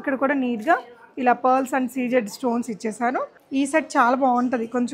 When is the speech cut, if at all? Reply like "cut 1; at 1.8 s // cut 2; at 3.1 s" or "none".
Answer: cut 1; at 3.3 s